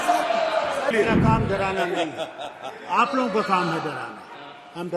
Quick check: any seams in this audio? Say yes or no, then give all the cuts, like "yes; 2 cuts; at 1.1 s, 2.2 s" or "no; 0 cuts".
yes; 1 cut; at 0.9 s